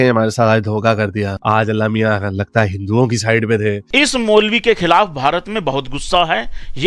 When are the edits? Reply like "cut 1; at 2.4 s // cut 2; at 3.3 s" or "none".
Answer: cut 1; at 3.8 s

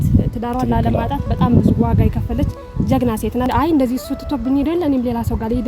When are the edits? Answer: cut 1; at 3.5 s

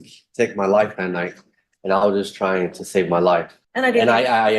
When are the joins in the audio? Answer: cut 1; at 3.6 s

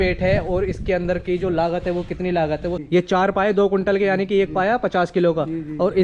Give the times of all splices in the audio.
cut 1; at 2.7 s

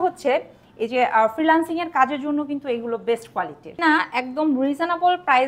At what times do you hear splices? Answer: cut 1; at 3.7 s

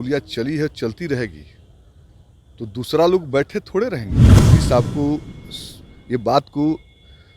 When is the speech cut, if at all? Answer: cut 1; at 4.3 s

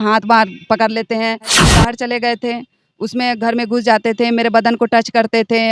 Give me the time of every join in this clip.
cut 1; at 1.7 s

